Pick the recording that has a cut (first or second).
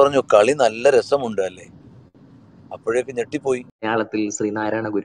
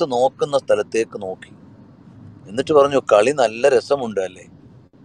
first